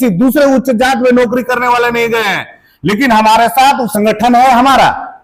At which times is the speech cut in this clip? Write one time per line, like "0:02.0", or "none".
0:03.9